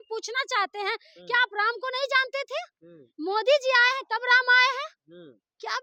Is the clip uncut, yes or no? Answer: yes